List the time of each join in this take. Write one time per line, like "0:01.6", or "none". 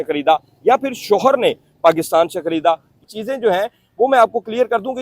0:02.9